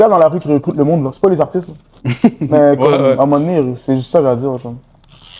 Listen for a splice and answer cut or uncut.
uncut